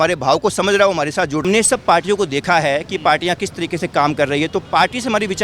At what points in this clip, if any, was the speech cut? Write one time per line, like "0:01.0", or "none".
0:01.4